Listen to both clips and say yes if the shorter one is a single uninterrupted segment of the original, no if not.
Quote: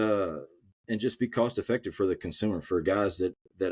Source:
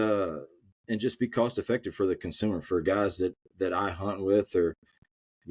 yes